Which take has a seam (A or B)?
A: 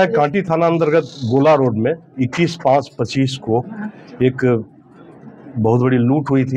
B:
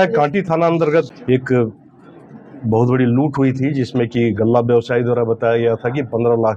B